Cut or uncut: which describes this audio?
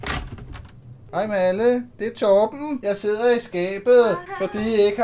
cut